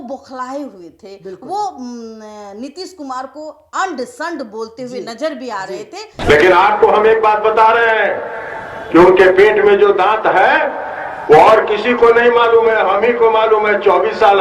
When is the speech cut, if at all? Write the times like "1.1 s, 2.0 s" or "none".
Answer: 6.0 s